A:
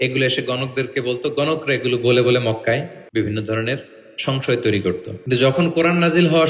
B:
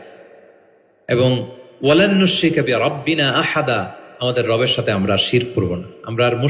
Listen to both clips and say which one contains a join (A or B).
A